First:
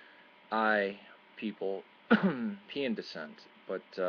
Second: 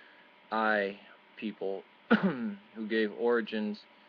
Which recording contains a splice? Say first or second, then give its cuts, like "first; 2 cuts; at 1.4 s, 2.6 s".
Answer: second; 1 cut; at 2.6 s